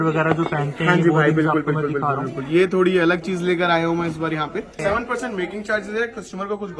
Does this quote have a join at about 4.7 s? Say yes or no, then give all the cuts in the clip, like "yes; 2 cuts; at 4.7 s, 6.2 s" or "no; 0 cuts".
yes; 1 cut; at 4.7 s